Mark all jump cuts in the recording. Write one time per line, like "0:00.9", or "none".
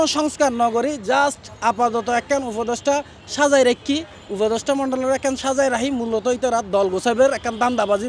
none